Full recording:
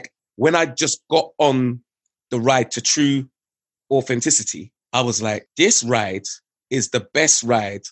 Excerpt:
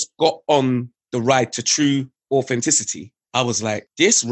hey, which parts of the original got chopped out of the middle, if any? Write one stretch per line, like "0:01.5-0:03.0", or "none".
0:01.9-0:02.2
0:03.3-0:03.7